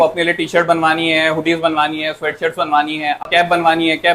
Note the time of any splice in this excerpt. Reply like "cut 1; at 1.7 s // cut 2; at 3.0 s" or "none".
cut 1; at 3.2 s